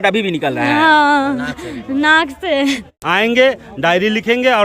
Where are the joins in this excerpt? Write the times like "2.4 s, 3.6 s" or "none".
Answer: 2.9 s